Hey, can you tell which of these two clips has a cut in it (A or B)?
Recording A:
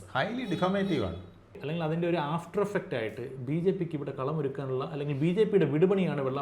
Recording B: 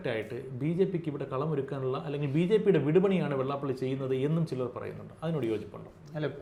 A